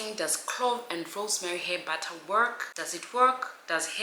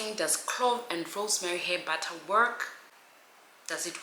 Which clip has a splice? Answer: first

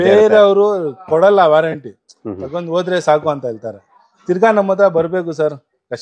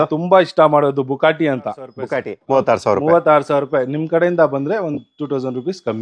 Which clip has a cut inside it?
second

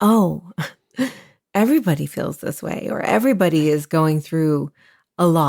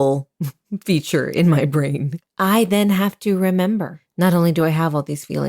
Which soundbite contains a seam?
second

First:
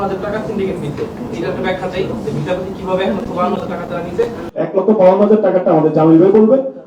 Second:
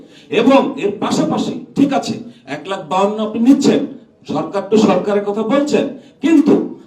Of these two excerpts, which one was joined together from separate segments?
first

